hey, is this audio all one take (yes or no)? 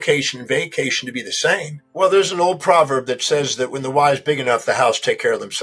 no